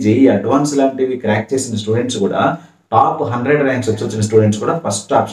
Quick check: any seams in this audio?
yes; 1 cut; at 4.1 s

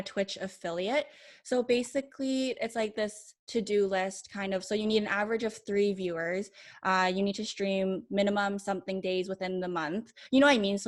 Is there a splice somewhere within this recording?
no; 0 cuts

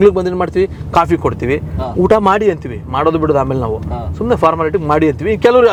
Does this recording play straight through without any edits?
yes; 0 cuts

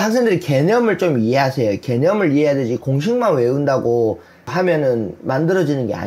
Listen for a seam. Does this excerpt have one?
no; 0 cuts

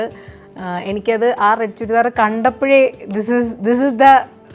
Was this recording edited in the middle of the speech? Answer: no; 0 cuts

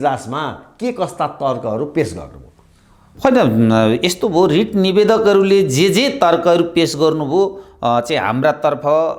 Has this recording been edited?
no; 0 cuts

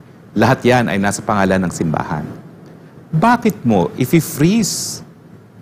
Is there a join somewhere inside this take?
no; 0 cuts

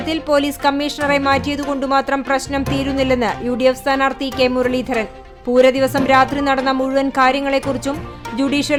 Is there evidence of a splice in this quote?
no; 0 cuts

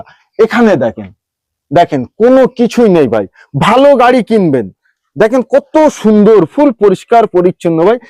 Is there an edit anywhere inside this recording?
no; 0 cuts

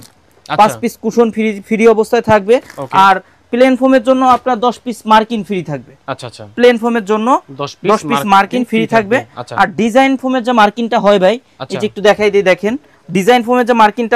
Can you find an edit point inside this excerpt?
no; 0 cuts

